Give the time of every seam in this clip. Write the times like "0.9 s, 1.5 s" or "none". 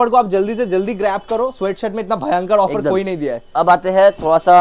none